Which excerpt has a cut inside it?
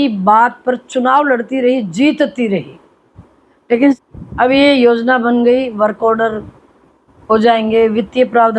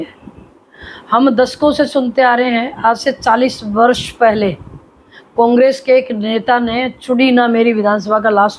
first; 1 cut; at 4.0 s

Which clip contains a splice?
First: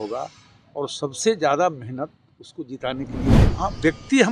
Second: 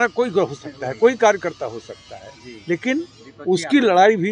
first; 1 cut; at 3.4 s

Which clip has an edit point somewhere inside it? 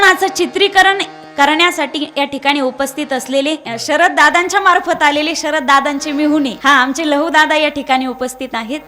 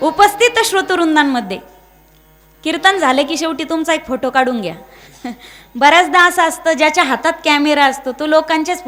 first; 1 cut; at 6.6 s

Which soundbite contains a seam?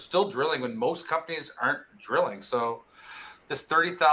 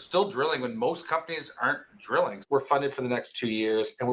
second; 1 cut; at 2.4 s

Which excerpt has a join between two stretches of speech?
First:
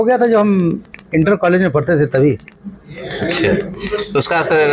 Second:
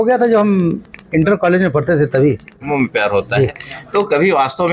second; 1 cut; at 2.7 s

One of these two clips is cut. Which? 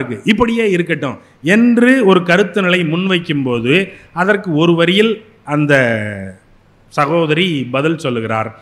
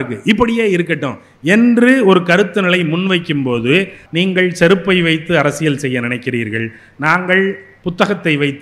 second; 1 cut; at 4.0 s

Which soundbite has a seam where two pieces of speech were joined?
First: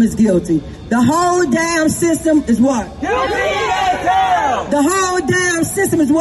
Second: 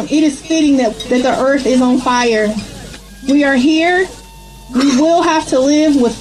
second; 1 cut; at 0.9 s

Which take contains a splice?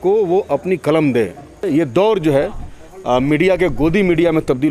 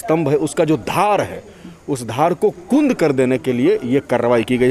first; 1 cut; at 1.7 s

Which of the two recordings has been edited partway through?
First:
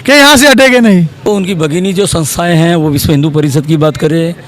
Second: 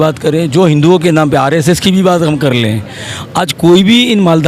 first; 1 cut; at 1.2 s

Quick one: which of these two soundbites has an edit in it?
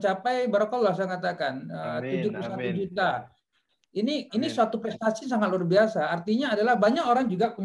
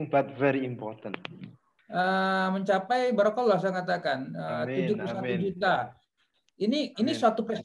second; 1 cut; at 1.7 s

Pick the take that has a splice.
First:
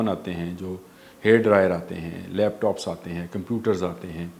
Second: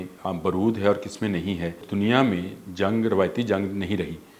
second; 1 cut; at 1.8 s

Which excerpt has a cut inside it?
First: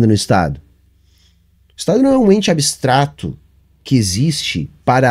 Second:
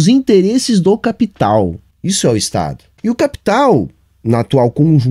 second; 2 cuts; at 1.9 s, 2.9 s

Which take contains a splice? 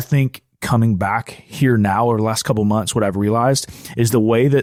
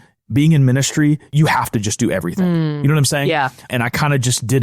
second; 2 cuts; at 1.3 s, 3.7 s

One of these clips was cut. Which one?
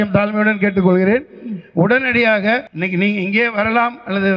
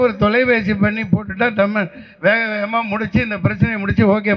first; 1 cut; at 2.7 s

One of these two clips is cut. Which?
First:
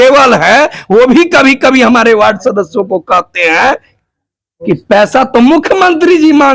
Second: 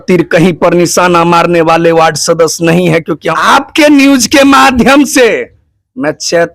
second; 1 cut; at 3.1 s

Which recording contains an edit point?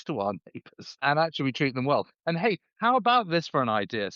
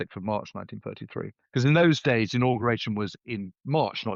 first; 1 cut; at 1.0 s

